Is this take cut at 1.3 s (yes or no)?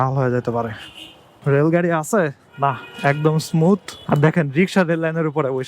yes